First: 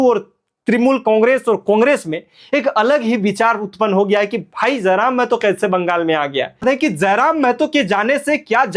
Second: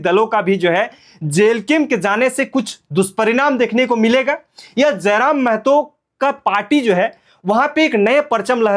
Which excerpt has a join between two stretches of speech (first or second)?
first